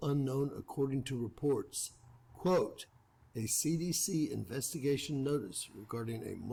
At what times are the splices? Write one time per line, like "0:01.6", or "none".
none